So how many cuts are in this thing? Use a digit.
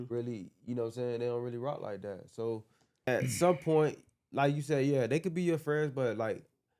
1